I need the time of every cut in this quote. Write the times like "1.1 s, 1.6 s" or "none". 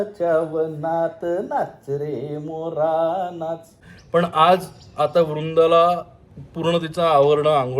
3.6 s